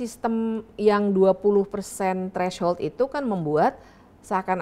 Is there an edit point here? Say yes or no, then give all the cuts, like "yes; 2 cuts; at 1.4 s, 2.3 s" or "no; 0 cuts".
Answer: no; 0 cuts